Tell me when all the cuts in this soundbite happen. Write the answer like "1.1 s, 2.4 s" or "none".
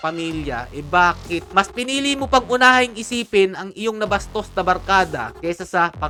none